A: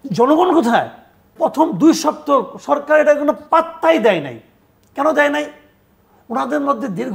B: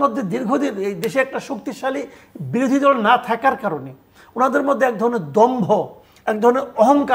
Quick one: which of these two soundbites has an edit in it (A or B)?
A